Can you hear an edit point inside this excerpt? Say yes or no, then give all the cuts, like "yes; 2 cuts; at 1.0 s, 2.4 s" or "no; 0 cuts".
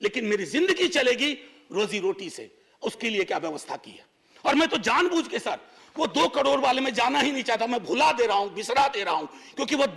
no; 0 cuts